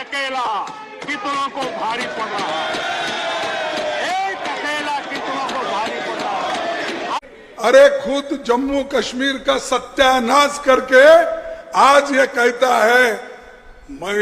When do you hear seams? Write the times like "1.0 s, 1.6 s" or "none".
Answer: 7.2 s